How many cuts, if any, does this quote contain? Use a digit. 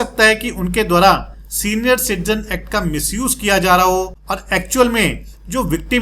1